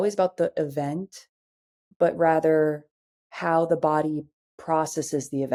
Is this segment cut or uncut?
uncut